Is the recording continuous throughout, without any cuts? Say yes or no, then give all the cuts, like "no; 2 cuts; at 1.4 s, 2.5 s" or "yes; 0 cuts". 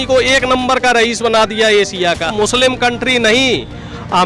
no; 1 cut; at 2.3 s